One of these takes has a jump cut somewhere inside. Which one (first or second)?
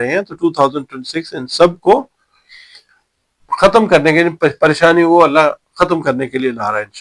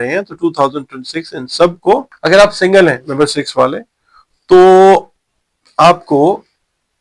second